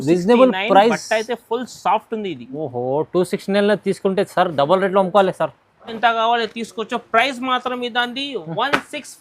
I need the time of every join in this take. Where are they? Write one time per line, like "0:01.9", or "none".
0:06.0